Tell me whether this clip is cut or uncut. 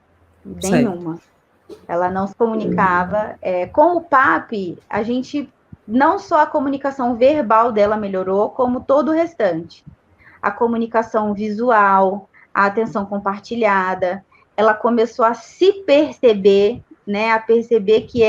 cut